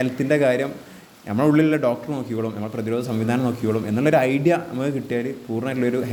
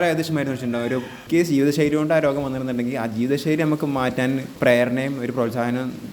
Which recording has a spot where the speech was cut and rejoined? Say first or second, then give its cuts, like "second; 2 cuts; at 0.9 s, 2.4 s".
second; 2 cuts; at 1.2 s, 4.5 s